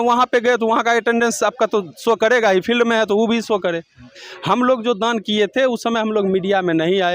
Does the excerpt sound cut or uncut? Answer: cut